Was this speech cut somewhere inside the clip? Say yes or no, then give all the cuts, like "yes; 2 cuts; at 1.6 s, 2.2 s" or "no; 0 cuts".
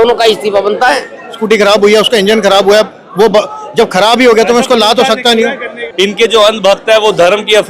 yes; 2 cuts; at 1.4 s, 5.8 s